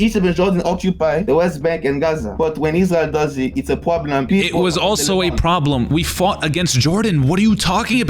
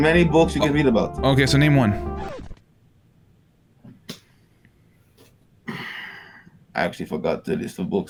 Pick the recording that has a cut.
first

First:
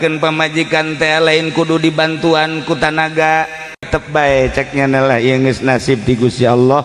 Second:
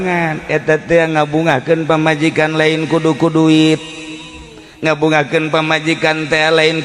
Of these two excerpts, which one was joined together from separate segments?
first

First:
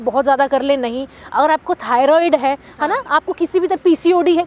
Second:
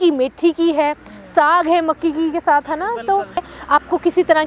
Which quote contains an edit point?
second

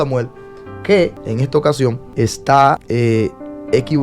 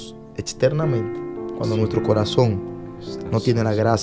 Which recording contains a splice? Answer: first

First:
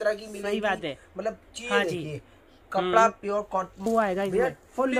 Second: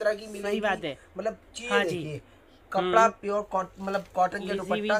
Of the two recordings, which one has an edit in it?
first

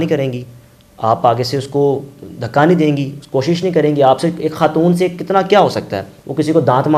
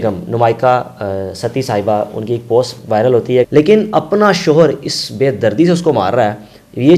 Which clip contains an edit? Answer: second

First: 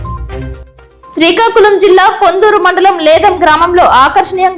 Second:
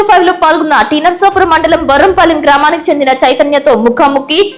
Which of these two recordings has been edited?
first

